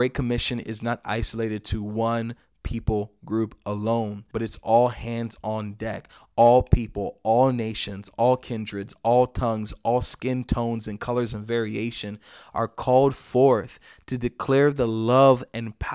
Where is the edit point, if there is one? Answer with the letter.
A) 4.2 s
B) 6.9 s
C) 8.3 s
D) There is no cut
A